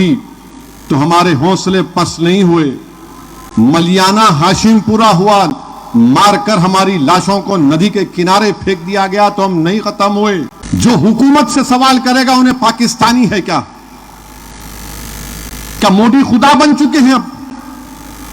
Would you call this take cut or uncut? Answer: cut